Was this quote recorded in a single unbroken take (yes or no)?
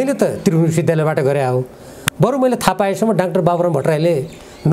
yes